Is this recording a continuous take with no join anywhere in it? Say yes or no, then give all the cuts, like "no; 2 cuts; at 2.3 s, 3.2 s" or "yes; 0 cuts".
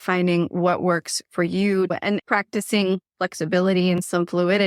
no; 1 cut; at 1.9 s